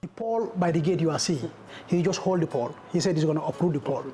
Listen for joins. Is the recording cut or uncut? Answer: uncut